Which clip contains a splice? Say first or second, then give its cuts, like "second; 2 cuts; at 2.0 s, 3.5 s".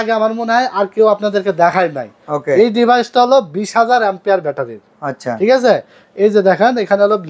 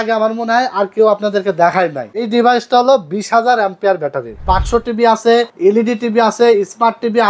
second; 3 cuts; at 2.2 s, 4.4 s, 5.5 s